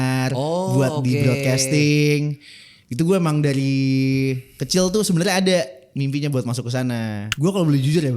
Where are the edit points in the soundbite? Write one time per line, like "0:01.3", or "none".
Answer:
0:07.3